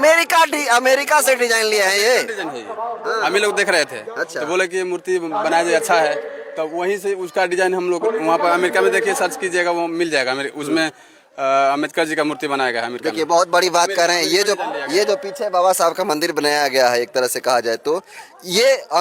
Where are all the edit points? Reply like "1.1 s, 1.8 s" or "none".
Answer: none